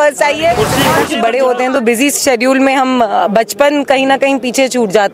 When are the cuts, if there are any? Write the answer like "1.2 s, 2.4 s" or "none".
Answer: 1.0 s